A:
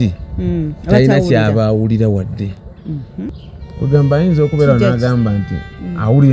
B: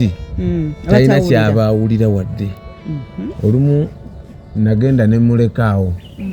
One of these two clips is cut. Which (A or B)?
A